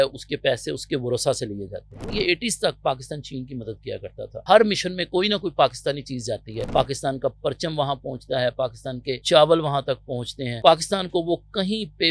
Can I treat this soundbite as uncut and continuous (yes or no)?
no